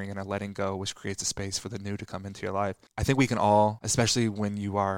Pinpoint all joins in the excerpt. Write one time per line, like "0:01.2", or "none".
0:02.9
0:03.8